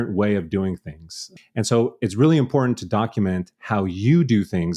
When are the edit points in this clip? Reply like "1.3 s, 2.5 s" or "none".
none